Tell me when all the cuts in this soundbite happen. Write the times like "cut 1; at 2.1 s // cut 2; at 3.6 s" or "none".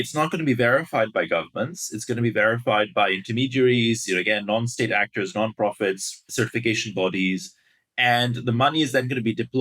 cut 1; at 6.3 s